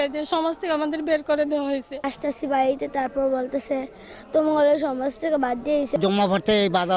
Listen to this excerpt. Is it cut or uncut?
cut